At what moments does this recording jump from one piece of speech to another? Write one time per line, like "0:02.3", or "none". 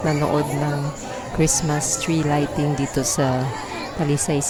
none